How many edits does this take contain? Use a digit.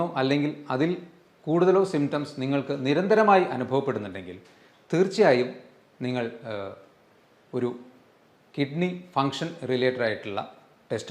0